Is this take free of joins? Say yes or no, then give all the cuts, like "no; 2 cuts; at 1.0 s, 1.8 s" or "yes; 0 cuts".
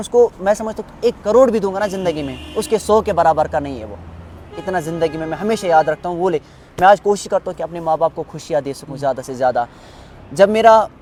yes; 0 cuts